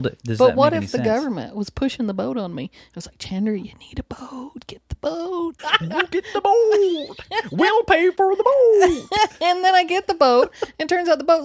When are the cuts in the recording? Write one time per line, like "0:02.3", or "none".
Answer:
0:05.7